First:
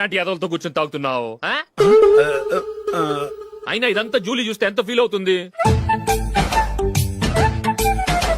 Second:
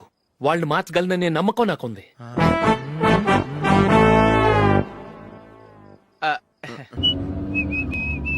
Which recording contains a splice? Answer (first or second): second